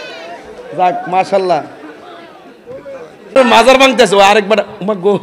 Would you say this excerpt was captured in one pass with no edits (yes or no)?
no